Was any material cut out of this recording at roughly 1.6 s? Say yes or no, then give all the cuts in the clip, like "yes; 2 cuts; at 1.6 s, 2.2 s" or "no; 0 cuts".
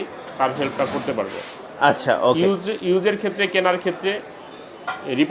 no; 0 cuts